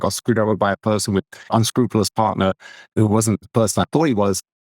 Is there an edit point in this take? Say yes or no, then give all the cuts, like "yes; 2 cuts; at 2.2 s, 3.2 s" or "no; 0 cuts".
yes; 2 cuts; at 1.5 s, 2.9 s